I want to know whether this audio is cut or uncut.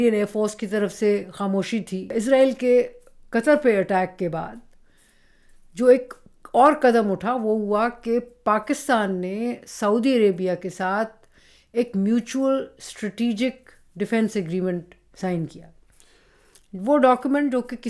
cut